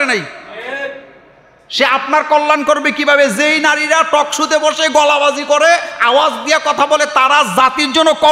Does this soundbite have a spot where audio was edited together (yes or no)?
no